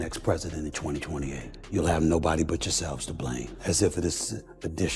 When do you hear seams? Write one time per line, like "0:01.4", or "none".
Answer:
0:01.5
0:03.5